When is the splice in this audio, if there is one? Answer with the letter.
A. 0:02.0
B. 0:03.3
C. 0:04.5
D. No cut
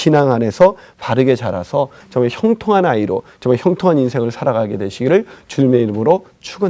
A